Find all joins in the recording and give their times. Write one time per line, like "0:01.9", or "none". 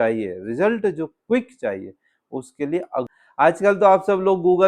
0:03.1